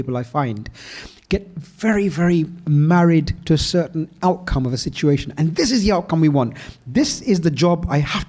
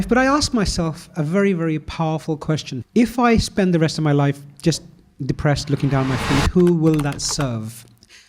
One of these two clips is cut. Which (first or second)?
second